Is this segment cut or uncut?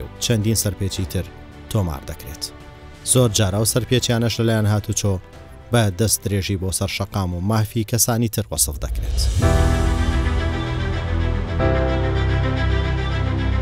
cut